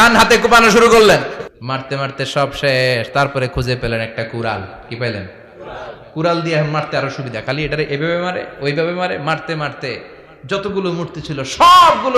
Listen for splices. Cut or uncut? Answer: cut